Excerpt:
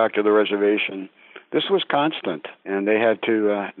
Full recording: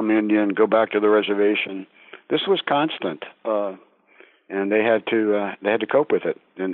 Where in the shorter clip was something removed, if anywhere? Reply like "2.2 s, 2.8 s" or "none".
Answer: 2.5 s